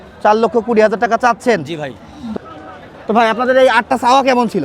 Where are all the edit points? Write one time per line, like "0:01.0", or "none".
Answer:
0:02.4